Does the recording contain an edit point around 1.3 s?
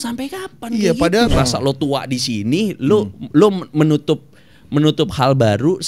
yes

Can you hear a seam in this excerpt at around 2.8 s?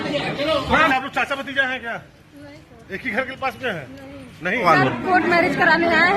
no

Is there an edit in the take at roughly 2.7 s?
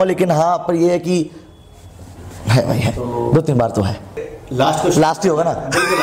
no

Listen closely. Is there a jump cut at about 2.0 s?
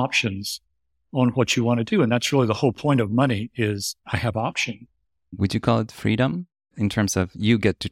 no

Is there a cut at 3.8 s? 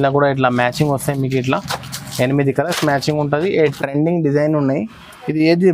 yes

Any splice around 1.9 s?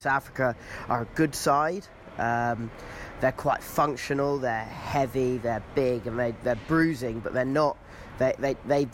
no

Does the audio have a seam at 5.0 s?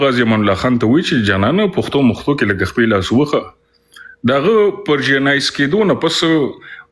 no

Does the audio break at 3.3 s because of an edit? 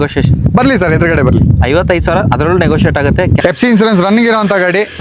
yes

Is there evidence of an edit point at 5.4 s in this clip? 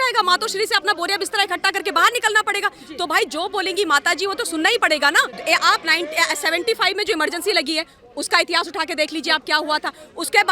yes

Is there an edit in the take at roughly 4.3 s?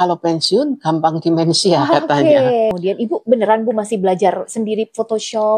no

